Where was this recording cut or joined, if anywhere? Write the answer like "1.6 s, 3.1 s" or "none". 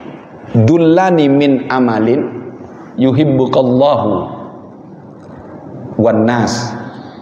none